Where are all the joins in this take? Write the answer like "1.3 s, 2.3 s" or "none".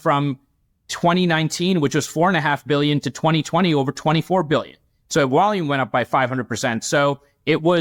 none